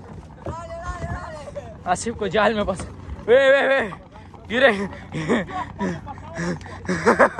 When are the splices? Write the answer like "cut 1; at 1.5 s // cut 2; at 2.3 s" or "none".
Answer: none